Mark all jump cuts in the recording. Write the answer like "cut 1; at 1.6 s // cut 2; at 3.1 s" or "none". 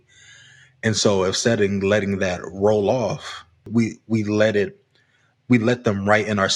cut 1; at 3.6 s